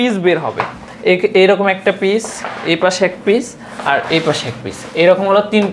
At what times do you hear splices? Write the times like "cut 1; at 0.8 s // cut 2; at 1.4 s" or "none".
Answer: none